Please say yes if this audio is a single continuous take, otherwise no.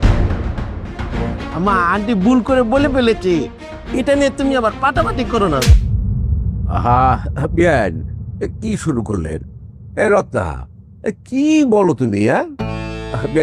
no